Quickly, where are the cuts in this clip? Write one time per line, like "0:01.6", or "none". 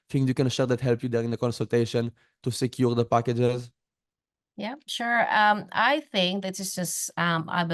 none